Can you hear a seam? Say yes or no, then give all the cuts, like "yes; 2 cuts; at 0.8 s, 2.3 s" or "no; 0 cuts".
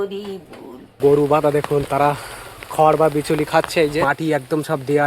yes; 2 cuts; at 1.0 s, 4.1 s